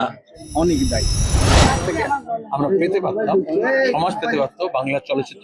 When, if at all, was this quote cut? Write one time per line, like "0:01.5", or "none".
0:01.4